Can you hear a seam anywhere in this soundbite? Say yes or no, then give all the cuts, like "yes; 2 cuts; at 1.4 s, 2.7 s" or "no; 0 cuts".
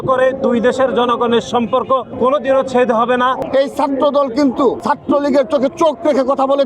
yes; 3 cuts; at 2.1 s, 3.4 s, 4.8 s